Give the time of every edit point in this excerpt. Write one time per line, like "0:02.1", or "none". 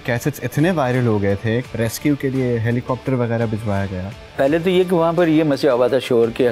0:01.6
0:04.2